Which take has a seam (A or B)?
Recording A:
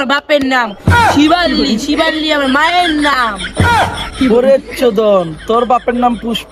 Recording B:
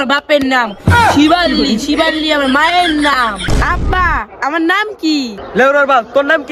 B